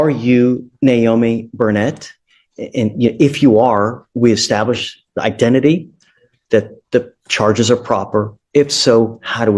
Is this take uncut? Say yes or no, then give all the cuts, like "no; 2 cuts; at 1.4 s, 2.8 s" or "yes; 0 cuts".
yes; 0 cuts